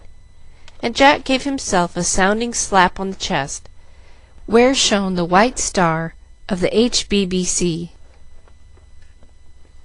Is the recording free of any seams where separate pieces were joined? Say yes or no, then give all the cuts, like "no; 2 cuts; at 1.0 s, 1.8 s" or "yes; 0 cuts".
no; 1 cut; at 2.6 s